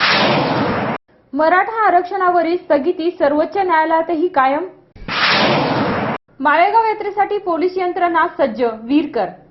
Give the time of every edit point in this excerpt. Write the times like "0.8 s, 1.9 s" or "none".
1.1 s